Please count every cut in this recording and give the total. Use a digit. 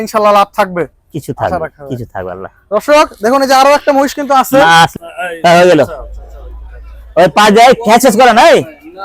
1